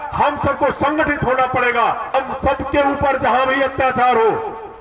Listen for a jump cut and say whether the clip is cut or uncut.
cut